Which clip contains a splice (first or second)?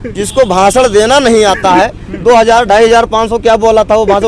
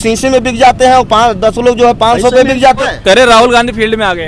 second